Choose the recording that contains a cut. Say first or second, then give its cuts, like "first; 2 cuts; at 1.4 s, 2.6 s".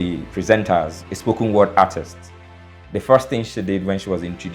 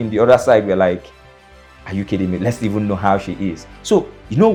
first; 1 cut; at 1.0 s